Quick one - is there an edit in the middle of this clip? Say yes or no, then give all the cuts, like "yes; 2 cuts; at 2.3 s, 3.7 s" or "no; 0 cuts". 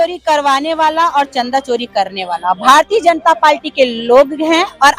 no; 0 cuts